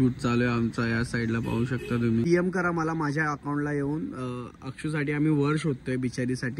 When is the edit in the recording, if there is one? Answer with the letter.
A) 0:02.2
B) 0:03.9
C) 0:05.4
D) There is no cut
A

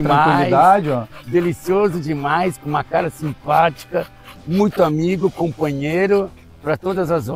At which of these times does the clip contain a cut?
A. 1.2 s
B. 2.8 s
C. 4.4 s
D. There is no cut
D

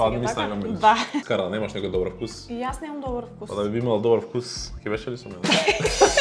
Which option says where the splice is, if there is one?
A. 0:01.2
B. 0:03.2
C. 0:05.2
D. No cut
A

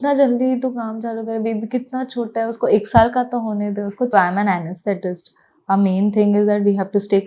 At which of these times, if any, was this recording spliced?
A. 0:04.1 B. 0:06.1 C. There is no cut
A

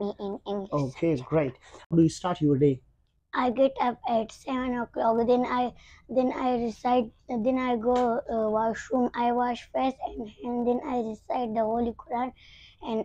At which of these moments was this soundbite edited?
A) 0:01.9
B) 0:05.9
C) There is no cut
A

